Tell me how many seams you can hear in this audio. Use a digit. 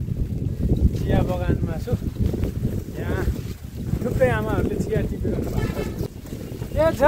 1